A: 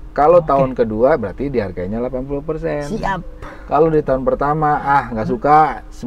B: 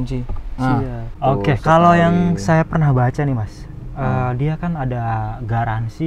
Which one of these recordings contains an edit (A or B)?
B